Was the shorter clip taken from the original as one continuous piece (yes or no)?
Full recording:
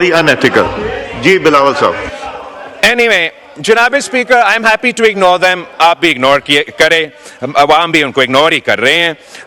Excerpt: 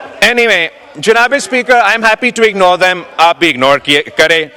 yes